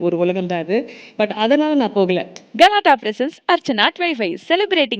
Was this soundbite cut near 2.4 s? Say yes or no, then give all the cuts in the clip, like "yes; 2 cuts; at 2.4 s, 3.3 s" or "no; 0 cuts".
yes; 1 cut; at 2.4 s